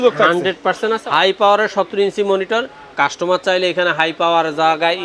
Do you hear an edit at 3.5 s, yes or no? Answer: no